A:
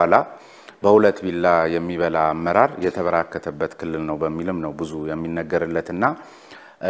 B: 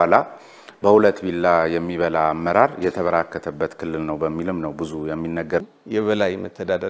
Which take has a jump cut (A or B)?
B